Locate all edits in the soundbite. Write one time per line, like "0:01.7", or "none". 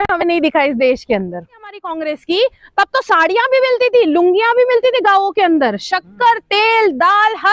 0:01.9